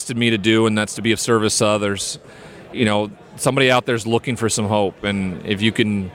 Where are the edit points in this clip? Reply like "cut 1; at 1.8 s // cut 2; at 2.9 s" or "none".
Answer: cut 1; at 2.1 s